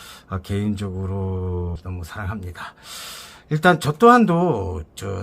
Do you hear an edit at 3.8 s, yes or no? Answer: no